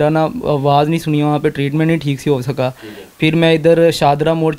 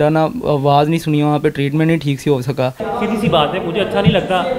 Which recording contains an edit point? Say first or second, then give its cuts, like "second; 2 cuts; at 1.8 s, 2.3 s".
second; 1 cut; at 2.8 s